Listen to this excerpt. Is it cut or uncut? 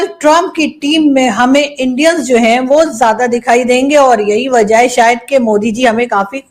uncut